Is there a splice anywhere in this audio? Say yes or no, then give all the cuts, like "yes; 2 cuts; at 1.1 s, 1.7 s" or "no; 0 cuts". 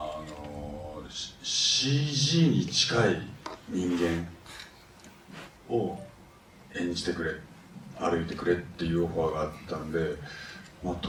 no; 0 cuts